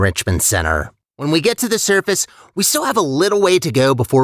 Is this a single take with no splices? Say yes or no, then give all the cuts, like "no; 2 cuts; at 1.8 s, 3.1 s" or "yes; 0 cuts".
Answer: no; 1 cut; at 1.0 s